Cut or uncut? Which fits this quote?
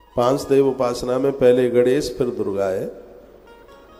uncut